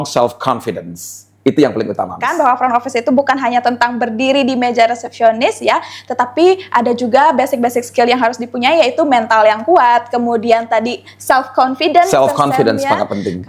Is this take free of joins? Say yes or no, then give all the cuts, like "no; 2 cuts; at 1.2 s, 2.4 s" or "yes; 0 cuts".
no; 1 cut; at 2.2 s